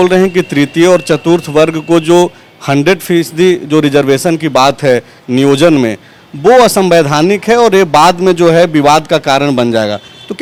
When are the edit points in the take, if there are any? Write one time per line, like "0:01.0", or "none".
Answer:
none